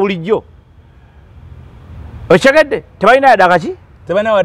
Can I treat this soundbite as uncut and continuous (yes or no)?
yes